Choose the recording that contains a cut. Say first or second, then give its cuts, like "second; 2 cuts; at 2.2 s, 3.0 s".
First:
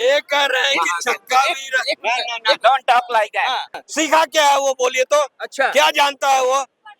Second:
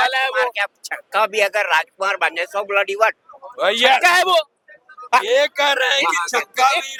first; 1 cut; at 3.8 s